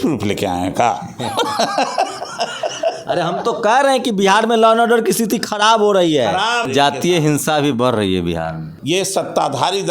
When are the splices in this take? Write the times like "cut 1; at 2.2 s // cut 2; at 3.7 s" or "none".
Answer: cut 1; at 6.7 s // cut 2; at 8.7 s